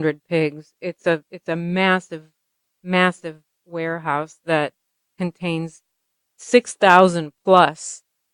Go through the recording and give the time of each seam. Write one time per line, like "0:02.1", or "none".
none